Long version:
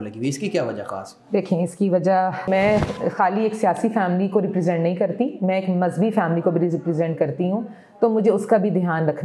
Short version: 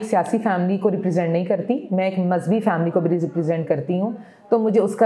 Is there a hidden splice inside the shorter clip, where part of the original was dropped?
no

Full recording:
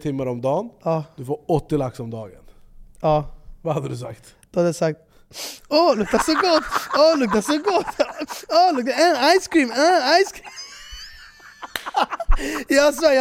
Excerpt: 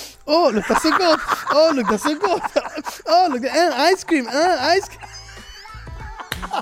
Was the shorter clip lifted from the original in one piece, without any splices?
yes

